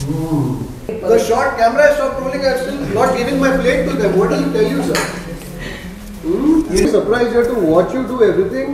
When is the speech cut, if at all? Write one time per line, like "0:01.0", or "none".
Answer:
0:00.9